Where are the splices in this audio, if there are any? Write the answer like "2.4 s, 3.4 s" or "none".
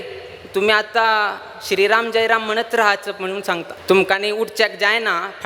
3.7 s